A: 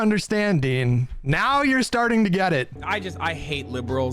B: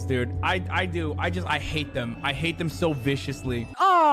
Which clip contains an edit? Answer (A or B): A